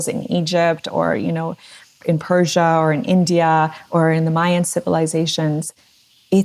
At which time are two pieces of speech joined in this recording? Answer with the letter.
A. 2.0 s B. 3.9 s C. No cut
A